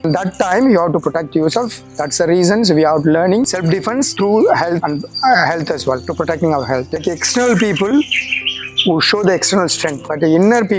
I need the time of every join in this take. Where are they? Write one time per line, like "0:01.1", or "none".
0:07.0